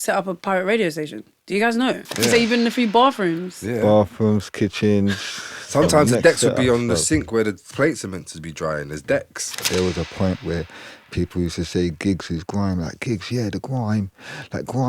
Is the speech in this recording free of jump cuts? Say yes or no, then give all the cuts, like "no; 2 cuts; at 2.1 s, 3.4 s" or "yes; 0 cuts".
no; 2 cuts; at 2.1 s, 9.6 s